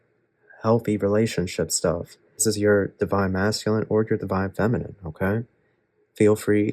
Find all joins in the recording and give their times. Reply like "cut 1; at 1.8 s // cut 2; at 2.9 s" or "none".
cut 1; at 2.4 s